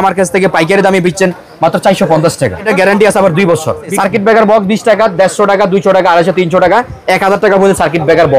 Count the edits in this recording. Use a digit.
2